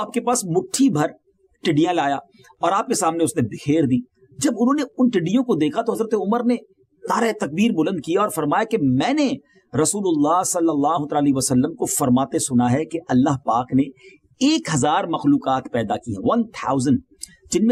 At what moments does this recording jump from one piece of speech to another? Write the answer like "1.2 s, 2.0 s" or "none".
none